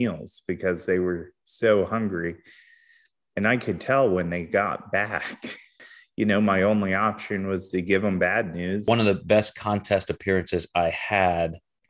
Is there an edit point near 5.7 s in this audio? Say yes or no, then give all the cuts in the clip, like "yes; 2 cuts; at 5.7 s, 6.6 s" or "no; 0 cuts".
yes; 2 cuts; at 5.7 s, 8.8 s